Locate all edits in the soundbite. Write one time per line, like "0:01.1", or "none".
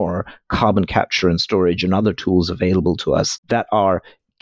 none